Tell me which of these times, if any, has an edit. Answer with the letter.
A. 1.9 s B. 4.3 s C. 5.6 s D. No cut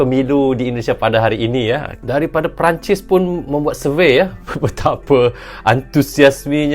A